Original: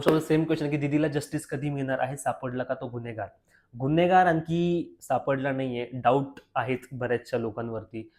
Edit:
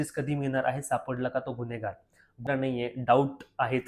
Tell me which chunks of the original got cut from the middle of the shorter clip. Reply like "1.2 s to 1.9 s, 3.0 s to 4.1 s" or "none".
3.8 s to 5.4 s